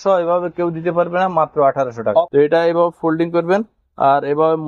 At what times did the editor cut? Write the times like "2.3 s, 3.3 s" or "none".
2.3 s